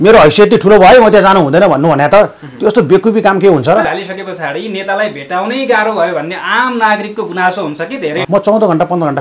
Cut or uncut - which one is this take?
cut